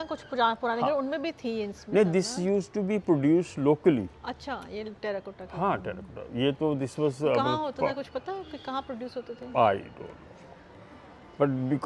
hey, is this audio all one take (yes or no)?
yes